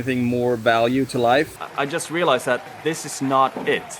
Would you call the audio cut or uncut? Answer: cut